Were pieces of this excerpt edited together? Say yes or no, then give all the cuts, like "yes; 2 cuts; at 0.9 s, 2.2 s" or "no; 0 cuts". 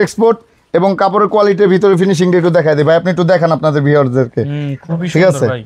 no; 0 cuts